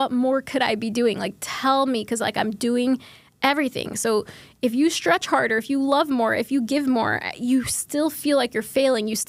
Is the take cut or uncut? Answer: uncut